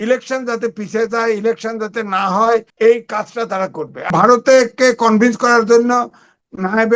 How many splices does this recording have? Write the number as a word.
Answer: two